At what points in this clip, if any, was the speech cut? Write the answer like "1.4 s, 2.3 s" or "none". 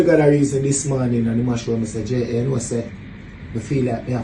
none